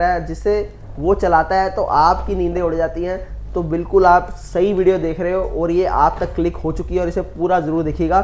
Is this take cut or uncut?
uncut